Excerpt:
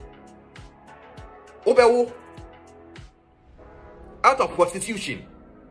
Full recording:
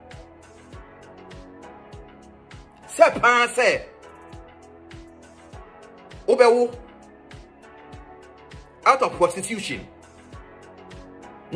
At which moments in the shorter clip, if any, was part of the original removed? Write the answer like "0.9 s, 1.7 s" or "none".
1.0 s